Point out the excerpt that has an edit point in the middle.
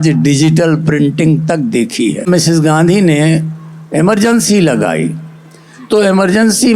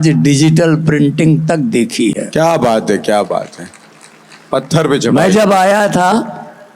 first; 1 cut; at 2.3 s

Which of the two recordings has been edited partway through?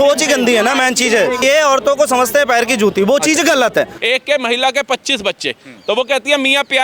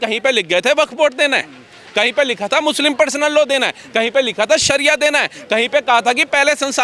first; 2 cuts; at 1.4 s, 4.0 s

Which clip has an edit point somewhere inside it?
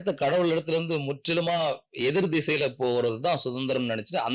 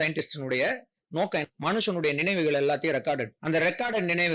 second; 2 cuts; at 1.4 s, 3.3 s

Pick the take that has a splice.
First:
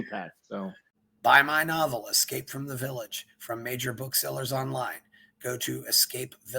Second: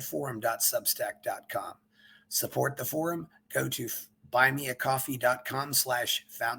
first; 1 cut; at 1.0 s

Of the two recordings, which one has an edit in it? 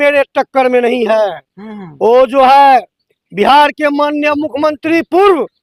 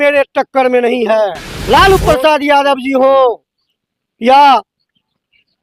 second; 1 cut; at 1.5 s

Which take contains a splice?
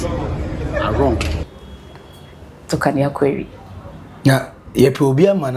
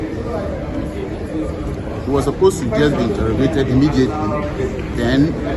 first; 1 cut; at 1.5 s

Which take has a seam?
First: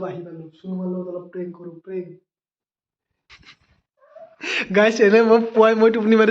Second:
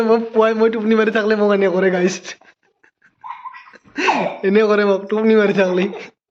first; 1 cut; at 3.3 s

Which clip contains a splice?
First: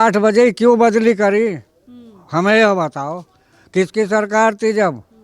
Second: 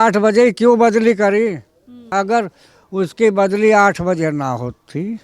second; 1 cut; at 2.1 s

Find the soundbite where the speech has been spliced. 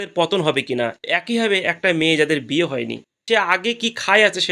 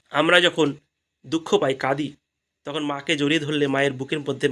first; 2 cuts; at 1.0 s, 3.1 s

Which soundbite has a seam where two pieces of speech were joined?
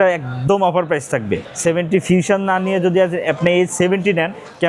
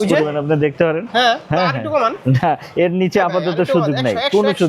first; 1 cut; at 1.5 s

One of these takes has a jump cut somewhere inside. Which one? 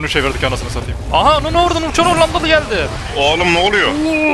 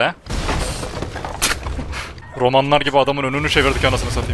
second; 1 cut; at 2.2 s

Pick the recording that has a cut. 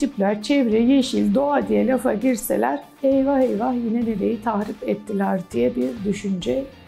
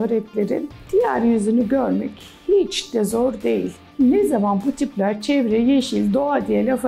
second; 1 cut; at 3.8 s

